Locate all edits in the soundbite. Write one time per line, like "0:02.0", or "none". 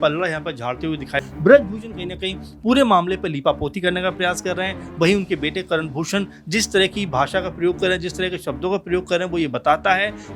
0:01.2